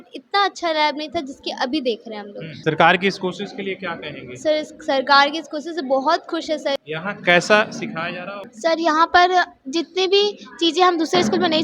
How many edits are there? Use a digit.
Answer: 3